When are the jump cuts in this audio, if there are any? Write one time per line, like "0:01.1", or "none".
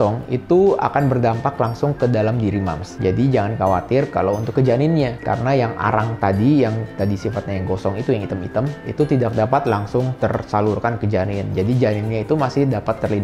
none

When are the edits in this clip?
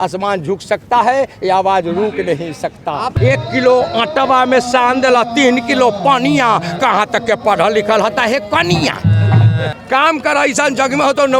0:03.1
0:09.7

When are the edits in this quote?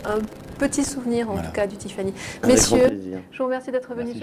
0:03.1

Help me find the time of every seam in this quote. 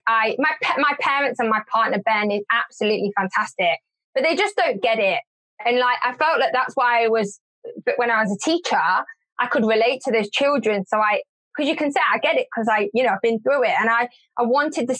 none

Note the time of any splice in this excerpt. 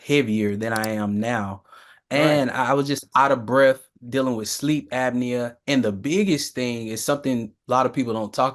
none

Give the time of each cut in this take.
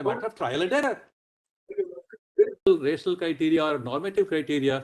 0:02.7

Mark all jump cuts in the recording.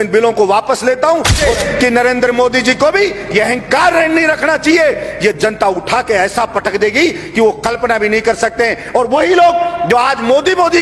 0:01.3

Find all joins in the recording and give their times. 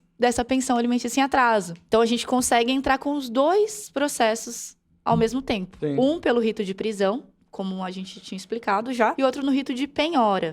0:01.7
0:05.7
0:09.1

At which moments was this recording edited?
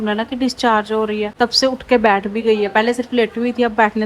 none

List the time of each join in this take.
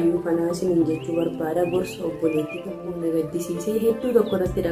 0:02.9

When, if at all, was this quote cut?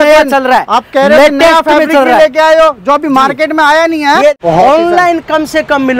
0:04.3

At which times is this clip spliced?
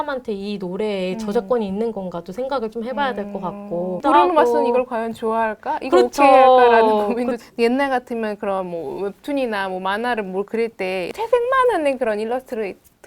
0:04.0
0:07.4
0:11.1

